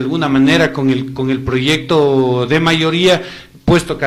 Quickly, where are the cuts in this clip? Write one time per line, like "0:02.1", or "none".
none